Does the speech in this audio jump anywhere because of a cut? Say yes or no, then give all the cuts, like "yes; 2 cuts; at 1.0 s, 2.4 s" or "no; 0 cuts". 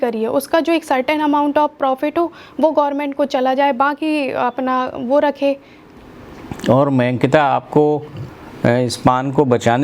yes; 1 cut; at 5.8 s